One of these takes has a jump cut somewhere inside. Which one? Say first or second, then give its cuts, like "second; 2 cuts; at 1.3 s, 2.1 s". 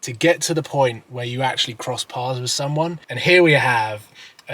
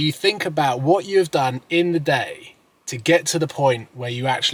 first; 1 cut; at 3.1 s